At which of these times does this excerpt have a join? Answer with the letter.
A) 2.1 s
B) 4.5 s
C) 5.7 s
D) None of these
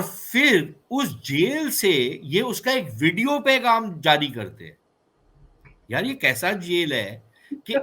D